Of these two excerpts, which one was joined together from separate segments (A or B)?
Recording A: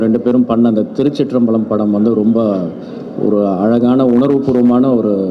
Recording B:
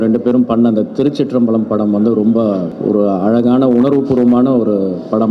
B